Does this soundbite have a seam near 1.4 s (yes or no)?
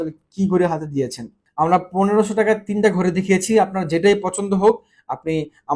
yes